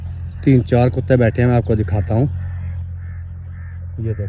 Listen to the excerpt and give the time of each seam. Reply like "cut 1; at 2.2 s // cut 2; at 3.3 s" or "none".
none